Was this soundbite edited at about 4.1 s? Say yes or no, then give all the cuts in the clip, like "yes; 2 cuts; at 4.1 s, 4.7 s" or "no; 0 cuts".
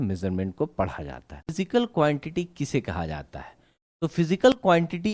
no; 1 cut; at 1.6 s